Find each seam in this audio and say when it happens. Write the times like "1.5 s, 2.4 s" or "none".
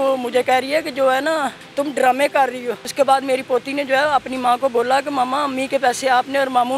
1.6 s, 2.8 s